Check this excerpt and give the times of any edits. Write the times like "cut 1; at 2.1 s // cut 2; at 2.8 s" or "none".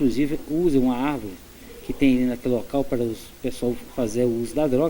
cut 1; at 3.9 s